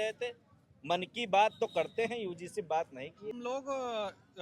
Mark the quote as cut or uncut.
cut